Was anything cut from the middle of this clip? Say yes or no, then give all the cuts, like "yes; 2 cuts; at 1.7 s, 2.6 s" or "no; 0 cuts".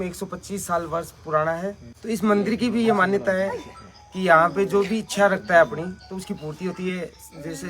yes; 1 cut; at 1.9 s